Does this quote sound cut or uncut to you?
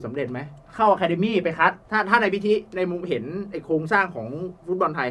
cut